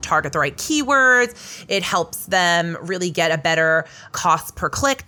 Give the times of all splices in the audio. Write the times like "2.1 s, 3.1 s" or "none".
none